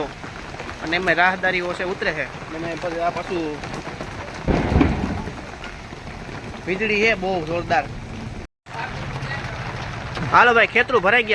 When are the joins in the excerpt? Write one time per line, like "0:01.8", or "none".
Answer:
0:08.4